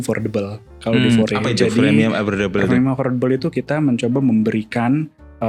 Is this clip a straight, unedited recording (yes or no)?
yes